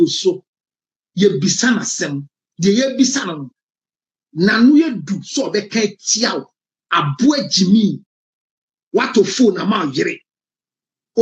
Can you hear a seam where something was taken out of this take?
no; 0 cuts

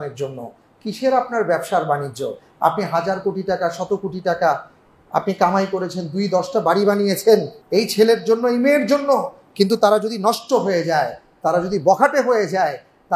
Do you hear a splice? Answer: yes; 1 cut; at 7.6 s

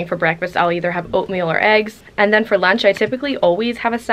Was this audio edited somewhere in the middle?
yes; 1 cut; at 2.0 s

